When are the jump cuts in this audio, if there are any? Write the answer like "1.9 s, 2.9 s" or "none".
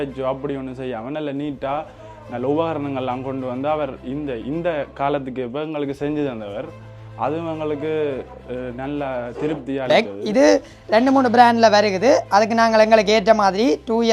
9.9 s